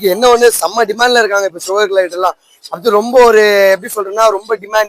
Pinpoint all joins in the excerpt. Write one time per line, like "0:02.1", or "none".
none

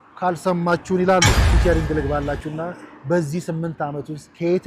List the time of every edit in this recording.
0:01.4

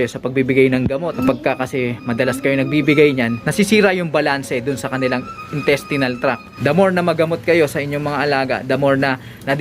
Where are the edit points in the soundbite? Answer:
0:01.1
0:03.4
0:06.5

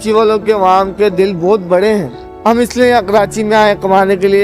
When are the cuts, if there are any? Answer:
0:02.2

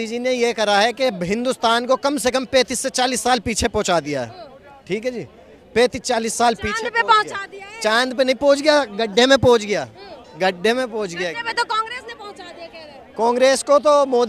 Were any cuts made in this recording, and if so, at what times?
none

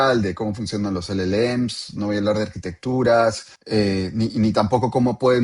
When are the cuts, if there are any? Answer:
0:03.5

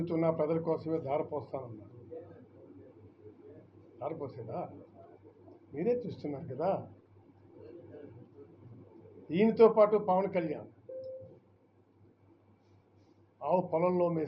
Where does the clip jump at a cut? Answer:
none

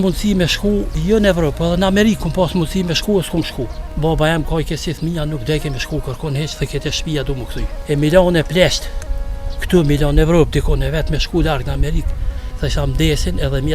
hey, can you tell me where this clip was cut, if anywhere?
0:00.9
0:03.8
0:07.7

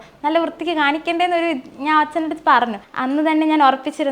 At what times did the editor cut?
0:02.9

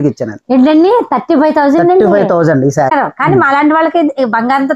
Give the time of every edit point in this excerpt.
0:02.9

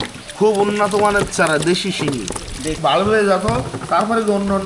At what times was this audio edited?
0:02.8

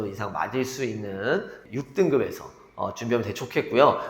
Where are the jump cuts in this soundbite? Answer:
0:01.6

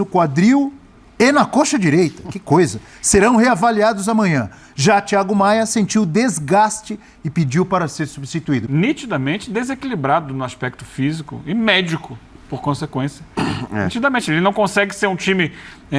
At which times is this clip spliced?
0:08.7

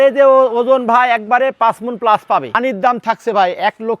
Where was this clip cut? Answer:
0:02.6

